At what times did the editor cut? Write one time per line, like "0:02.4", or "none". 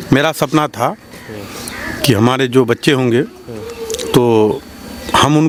none